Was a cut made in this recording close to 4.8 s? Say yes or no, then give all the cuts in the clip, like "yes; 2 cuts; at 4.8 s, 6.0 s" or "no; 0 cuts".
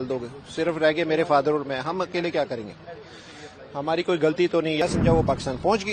yes; 1 cut; at 4.8 s